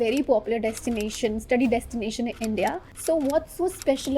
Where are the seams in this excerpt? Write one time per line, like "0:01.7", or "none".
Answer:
0:02.9